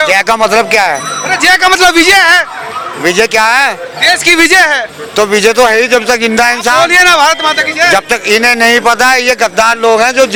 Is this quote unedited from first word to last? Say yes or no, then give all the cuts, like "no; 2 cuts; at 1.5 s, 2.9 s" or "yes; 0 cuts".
yes; 0 cuts